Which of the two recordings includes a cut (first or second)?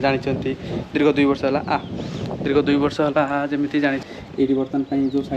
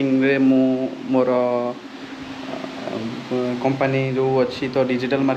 first